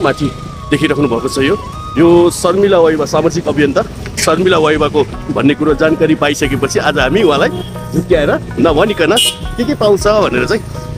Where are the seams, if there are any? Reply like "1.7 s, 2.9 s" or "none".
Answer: 5.2 s

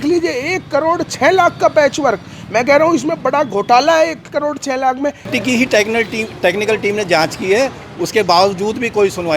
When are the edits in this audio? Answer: 5.3 s

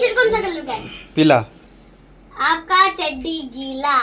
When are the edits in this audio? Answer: none

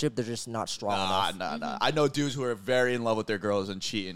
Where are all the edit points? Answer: none

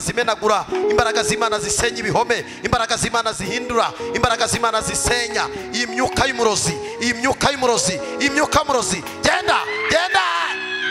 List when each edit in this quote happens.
none

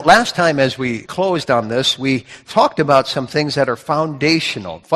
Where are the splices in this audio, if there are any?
1.0 s

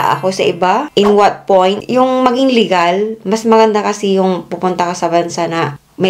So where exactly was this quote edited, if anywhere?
none

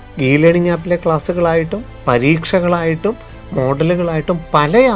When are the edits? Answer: none

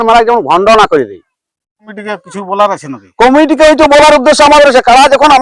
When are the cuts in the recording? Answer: 2.0 s

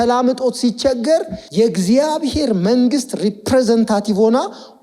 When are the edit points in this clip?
1.4 s

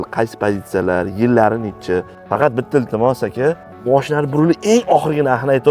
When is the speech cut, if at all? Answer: 2.2 s, 3.7 s

